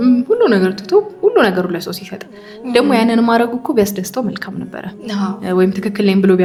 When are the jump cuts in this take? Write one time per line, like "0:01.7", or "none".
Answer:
none